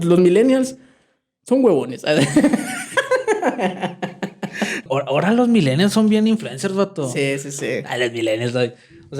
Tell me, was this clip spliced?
yes; 1 cut; at 4.9 s

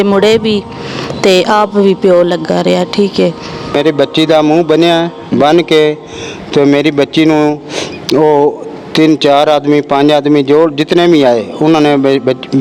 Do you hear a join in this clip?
yes; 1 cut; at 3.8 s

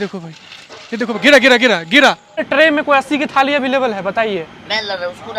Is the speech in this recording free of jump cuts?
no; 1 cut; at 2.4 s

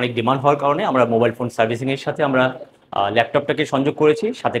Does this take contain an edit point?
no; 0 cuts

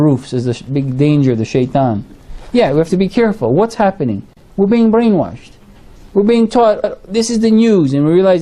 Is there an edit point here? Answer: yes; 1 cut; at 3.9 s

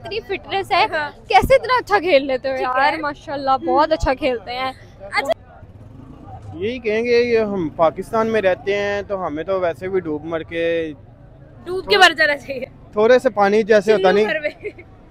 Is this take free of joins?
yes; 0 cuts

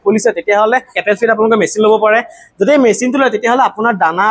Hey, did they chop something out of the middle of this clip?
yes; 1 cut; at 0.9 s

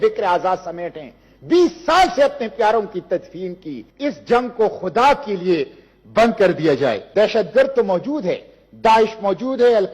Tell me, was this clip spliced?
yes; 1 cut; at 7.0 s

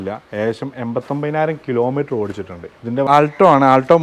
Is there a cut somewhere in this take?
yes; 1 cut; at 3.1 s

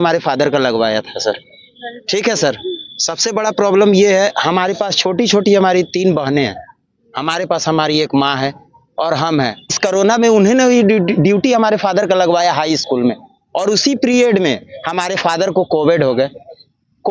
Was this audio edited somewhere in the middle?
no; 0 cuts

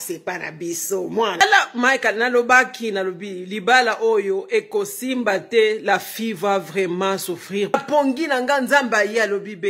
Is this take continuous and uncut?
no; 2 cuts; at 1.4 s, 7.7 s

